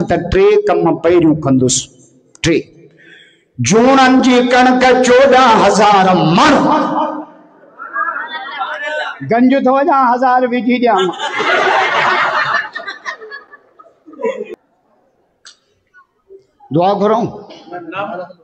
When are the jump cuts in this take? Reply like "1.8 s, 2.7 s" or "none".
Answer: 14.5 s